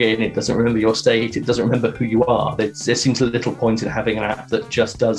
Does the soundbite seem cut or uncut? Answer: uncut